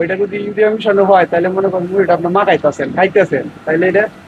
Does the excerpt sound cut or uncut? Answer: uncut